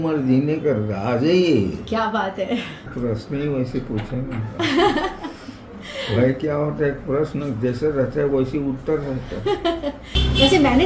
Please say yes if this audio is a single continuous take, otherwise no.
no